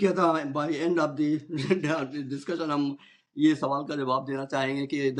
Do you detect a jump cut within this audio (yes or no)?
no